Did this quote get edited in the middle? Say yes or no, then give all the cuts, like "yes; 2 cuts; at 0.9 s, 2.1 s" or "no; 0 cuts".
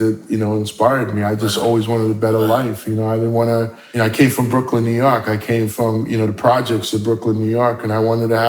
yes; 1 cut; at 3.8 s